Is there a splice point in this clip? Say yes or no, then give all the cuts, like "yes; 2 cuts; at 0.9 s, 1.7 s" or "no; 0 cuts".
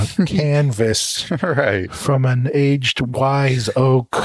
no; 0 cuts